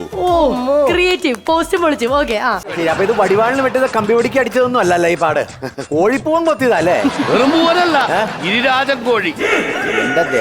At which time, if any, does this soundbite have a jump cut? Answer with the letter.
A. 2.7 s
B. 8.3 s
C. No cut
A